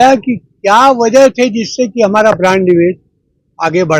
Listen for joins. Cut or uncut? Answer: uncut